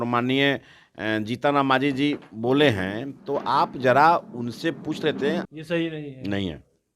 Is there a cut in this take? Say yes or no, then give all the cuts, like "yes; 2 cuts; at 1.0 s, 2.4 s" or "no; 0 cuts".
yes; 1 cut; at 5.5 s